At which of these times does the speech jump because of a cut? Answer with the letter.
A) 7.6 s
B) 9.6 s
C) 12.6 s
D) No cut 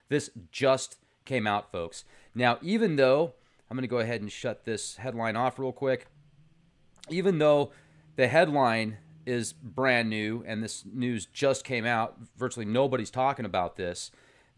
A